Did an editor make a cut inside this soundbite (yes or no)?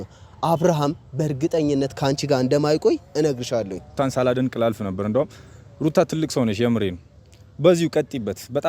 yes